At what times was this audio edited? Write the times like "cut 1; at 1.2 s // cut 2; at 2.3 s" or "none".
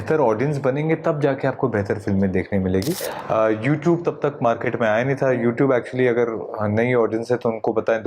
cut 1; at 3.1 s